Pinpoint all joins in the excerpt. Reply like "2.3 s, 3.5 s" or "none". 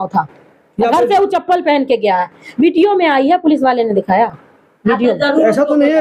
none

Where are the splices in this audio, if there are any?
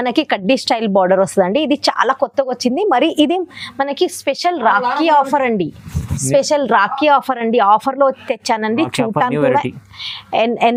none

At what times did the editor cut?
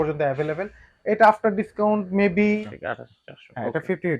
2.6 s

